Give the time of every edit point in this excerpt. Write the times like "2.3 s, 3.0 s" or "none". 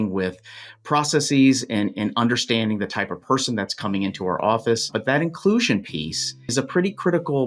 4.9 s, 6.4 s